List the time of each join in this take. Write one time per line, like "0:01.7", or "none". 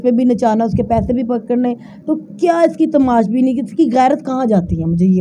none